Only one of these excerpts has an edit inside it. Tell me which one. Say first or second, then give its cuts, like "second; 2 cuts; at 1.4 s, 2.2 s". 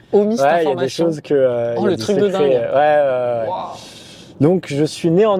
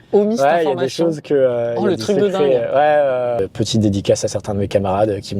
second; 1 cut; at 3.4 s